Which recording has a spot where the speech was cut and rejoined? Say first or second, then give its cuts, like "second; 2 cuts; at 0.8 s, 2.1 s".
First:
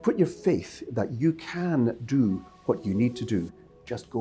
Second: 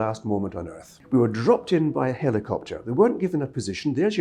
second; 1 cut; at 1.0 s